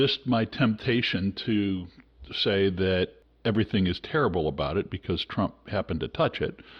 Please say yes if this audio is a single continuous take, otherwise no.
no